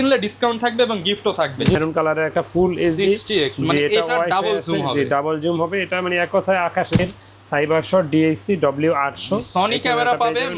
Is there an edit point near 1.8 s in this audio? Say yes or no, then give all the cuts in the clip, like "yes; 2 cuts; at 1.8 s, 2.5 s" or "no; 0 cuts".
yes; 2 cuts; at 1.8 s, 7.0 s